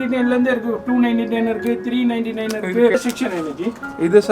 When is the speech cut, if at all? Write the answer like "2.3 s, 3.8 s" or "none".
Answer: 2.9 s